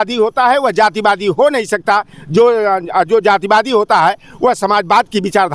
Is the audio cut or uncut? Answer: uncut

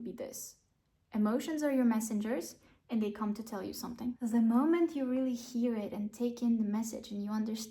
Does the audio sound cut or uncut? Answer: cut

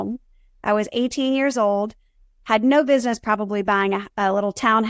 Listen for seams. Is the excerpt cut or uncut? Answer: uncut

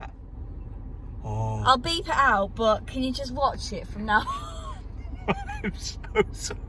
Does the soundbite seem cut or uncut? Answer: uncut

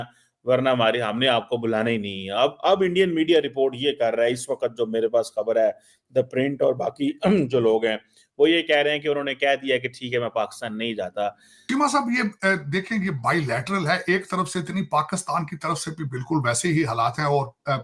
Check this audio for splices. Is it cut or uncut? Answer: uncut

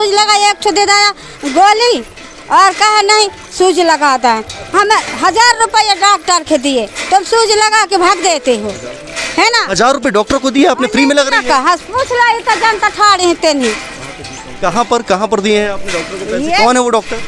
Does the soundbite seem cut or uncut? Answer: uncut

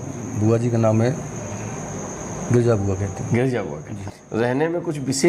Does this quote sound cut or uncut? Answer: cut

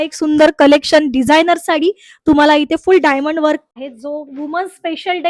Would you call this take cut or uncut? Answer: cut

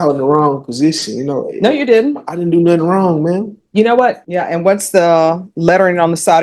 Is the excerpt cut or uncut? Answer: cut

